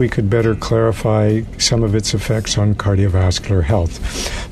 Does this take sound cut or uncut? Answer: uncut